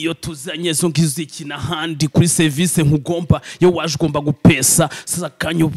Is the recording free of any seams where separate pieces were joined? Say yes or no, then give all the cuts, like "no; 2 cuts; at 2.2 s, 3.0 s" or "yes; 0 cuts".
yes; 0 cuts